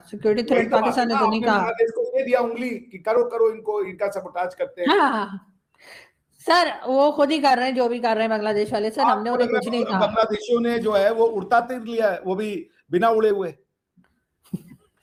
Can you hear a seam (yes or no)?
no